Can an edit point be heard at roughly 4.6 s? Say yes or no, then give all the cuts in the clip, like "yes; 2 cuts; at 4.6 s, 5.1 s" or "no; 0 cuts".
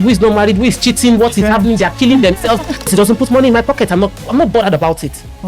no; 1 cut; at 2.9 s